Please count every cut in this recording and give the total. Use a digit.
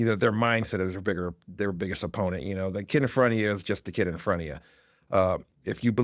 0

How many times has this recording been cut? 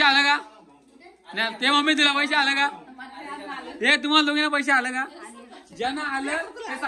0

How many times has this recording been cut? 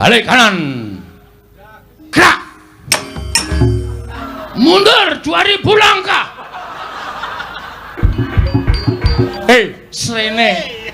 2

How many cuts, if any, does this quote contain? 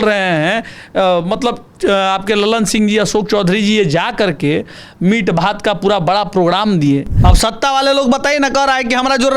1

